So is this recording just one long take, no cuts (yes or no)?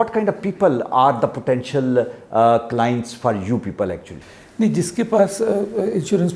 yes